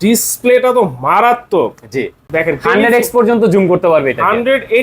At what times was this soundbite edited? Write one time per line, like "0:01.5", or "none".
0:02.2